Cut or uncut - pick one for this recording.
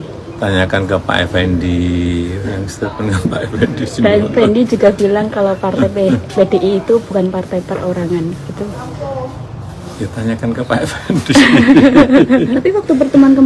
uncut